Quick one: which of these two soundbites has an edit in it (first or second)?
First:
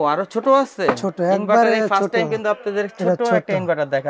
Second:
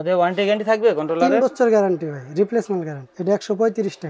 second